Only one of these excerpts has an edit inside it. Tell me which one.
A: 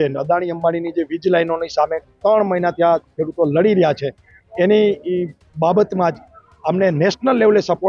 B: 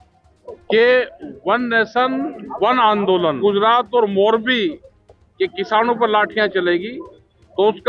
B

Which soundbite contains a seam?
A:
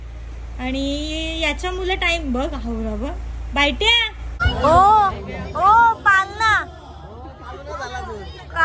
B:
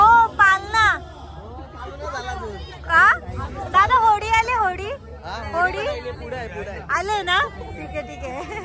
A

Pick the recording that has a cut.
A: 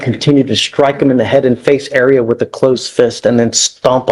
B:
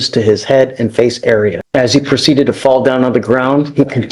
B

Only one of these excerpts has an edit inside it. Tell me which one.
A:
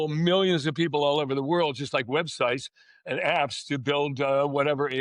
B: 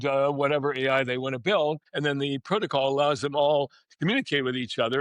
B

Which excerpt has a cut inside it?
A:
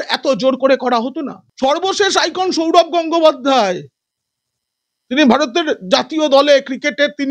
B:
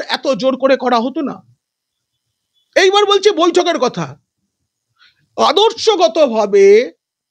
A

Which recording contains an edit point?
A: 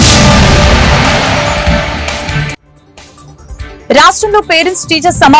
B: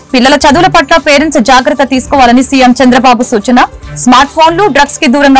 A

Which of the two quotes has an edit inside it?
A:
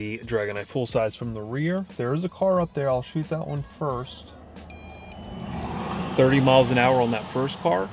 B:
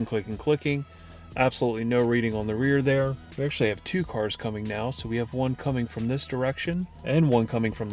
B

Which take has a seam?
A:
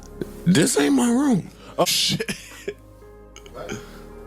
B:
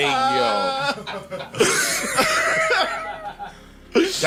A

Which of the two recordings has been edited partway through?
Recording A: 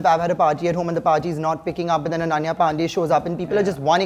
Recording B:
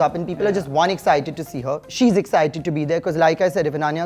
B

